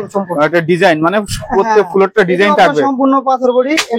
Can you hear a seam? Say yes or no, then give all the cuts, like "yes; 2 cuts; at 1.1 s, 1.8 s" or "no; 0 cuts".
no; 0 cuts